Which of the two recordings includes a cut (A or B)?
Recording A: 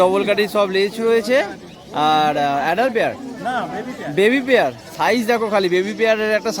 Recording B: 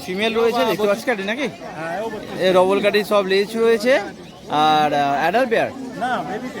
B